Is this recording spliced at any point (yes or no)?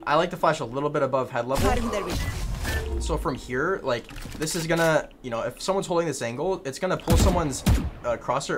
no